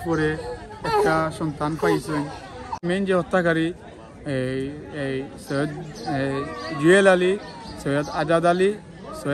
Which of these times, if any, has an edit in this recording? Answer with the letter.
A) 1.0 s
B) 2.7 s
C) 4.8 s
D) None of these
B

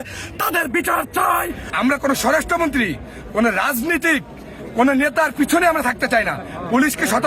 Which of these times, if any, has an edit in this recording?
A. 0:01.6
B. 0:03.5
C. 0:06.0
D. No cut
A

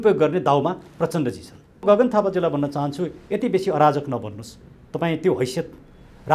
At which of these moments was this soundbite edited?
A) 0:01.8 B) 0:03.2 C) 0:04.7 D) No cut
A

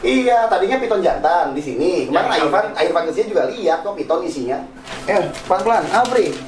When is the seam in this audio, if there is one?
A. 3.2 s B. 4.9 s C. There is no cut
B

